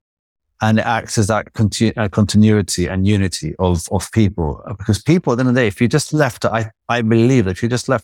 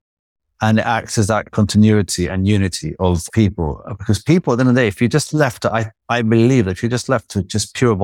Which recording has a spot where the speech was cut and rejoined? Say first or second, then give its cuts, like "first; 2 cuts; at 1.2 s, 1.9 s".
second; 2 cuts; at 1.5 s, 3.3 s